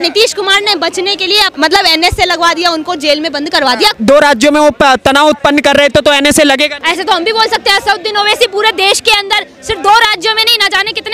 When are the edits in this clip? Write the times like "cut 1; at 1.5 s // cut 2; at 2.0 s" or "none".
cut 1; at 1.5 s // cut 2; at 4.0 s // cut 3; at 6.8 s